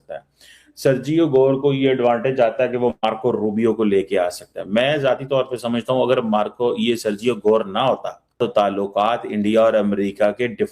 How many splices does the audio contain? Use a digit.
1